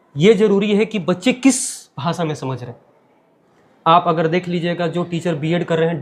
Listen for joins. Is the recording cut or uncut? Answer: uncut